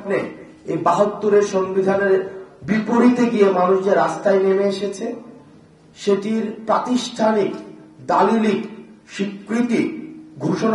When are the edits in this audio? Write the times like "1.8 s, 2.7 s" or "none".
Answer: none